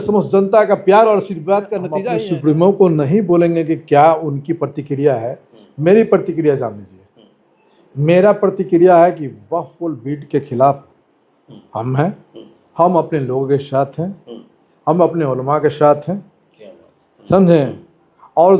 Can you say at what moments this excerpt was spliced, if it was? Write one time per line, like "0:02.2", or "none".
0:01.9